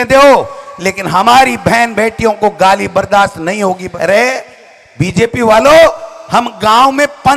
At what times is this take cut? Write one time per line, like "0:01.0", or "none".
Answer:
0:03.8

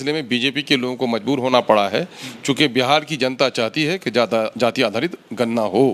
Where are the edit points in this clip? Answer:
none

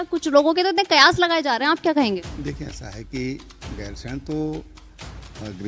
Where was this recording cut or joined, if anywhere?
none

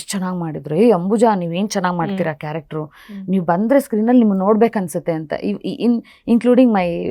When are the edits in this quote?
none

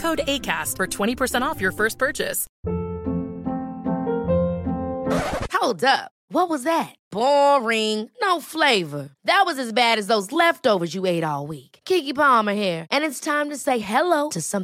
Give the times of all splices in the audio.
0:02.4

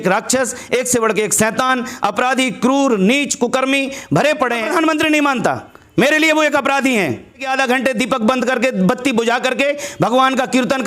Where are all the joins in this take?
0:04.6
0:07.5

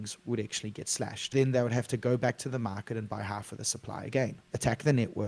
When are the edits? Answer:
0:01.2
0:04.4

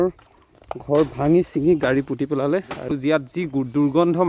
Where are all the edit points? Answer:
0:02.9

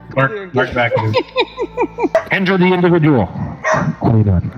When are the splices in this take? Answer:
0:02.1

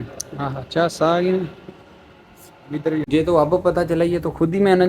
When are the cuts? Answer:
0:03.1

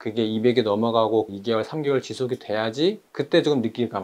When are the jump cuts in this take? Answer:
0:01.3

